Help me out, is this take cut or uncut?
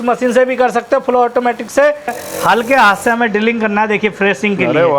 cut